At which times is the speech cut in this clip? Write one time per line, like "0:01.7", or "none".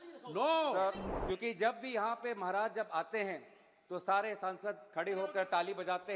0:01.1